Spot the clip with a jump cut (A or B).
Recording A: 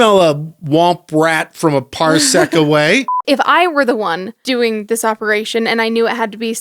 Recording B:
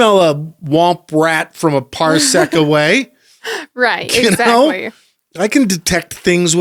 A